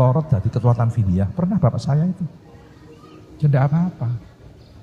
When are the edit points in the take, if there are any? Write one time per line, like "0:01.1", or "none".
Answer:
none